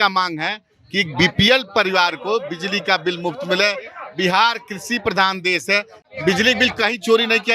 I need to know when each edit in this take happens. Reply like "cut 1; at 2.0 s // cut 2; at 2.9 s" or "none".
cut 1; at 6.0 s